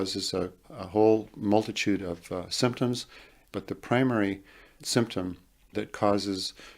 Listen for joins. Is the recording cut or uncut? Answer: cut